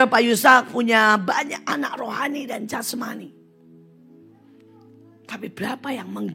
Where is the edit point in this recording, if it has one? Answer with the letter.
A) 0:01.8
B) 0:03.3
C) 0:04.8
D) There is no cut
D